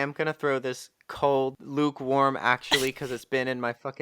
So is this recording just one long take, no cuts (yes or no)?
no